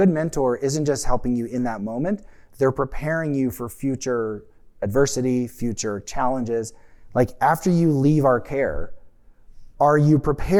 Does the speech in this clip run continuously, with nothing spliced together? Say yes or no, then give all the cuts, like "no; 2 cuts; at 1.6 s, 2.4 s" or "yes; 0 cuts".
yes; 0 cuts